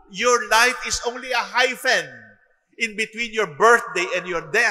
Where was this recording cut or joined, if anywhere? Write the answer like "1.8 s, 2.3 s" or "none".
none

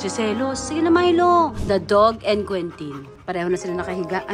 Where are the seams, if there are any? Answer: 1.6 s, 3.1 s

